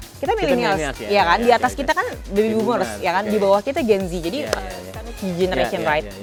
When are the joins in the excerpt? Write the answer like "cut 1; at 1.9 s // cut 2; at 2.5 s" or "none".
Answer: none